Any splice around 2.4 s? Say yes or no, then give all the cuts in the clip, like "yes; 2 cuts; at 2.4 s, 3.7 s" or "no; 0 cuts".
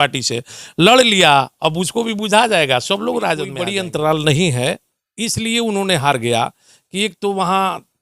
no; 1 cut; at 3.6 s